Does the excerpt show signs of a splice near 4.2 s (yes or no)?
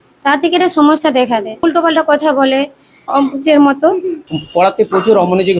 yes